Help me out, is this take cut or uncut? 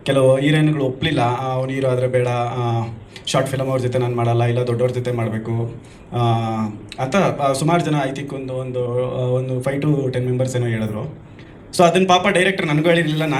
uncut